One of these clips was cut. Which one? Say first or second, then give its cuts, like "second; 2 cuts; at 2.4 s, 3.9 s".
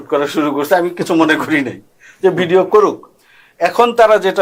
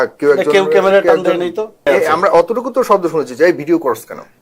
second; 1 cut; at 1.9 s